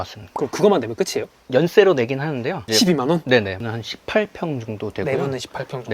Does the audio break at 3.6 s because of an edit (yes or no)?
yes